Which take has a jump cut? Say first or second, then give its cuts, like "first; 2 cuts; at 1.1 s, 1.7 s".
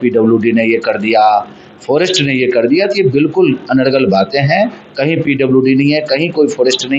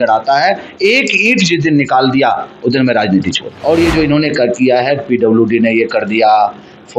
second; 1 cut; at 3.5 s